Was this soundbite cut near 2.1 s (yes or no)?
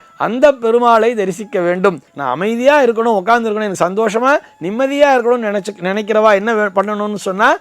yes